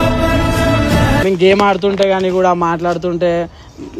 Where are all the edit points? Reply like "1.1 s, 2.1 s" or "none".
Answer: 1.2 s